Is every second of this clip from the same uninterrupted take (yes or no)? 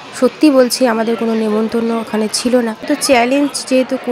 no